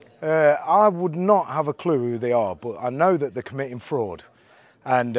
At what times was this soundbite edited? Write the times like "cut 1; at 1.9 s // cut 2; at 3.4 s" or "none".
none